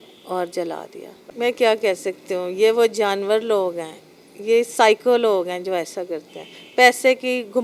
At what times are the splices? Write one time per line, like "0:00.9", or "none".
0:01.1